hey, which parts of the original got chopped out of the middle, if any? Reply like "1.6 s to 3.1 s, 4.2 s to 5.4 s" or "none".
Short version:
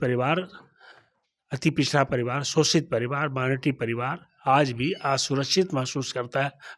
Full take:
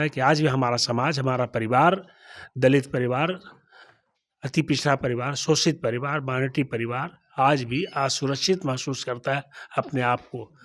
none